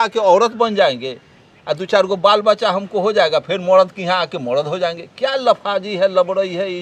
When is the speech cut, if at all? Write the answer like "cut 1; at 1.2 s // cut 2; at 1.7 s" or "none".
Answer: none